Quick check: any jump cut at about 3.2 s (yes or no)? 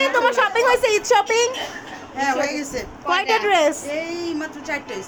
no